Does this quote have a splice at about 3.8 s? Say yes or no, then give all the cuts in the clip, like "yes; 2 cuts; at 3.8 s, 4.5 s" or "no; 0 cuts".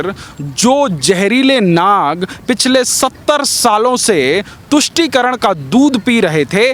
no; 0 cuts